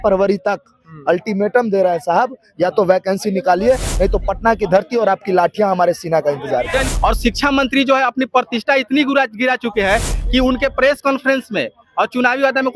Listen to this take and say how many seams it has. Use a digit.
1